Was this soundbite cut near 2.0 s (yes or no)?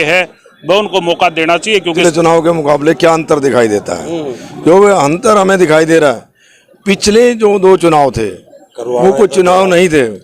yes